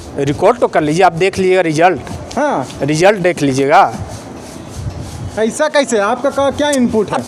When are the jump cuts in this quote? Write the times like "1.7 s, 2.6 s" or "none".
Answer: none